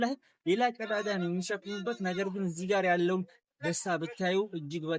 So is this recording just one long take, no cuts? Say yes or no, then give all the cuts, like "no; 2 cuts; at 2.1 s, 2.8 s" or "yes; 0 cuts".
yes; 0 cuts